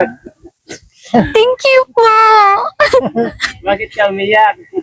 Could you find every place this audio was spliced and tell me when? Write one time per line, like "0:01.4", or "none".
none